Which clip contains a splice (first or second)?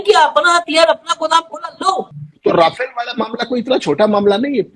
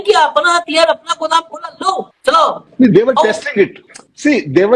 first